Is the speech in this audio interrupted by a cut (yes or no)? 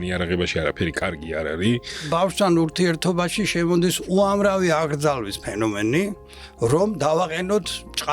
yes